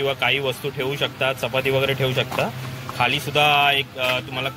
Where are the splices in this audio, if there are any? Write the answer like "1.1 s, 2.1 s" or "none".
none